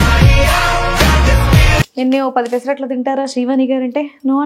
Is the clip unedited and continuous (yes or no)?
no